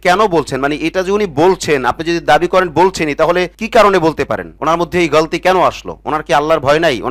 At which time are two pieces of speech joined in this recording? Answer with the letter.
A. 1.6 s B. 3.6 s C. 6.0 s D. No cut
D